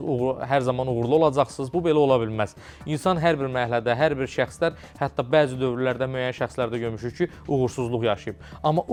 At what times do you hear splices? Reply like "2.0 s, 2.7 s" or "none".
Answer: none